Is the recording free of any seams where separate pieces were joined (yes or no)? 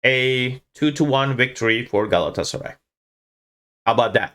yes